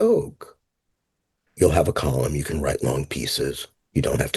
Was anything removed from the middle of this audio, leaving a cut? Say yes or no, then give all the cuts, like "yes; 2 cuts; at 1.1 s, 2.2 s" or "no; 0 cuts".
yes; 1 cut; at 1.4 s